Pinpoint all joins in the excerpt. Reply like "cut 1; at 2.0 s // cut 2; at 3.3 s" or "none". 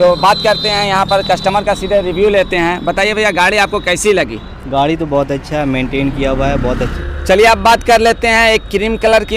cut 1; at 7.0 s